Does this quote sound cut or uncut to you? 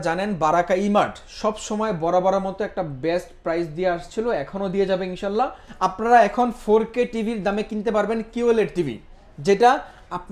cut